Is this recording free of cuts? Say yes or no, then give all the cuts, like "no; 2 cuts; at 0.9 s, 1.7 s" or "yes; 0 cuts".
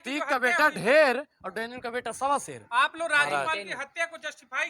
yes; 0 cuts